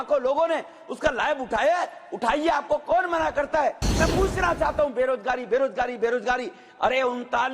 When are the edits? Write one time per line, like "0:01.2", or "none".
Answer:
0:03.9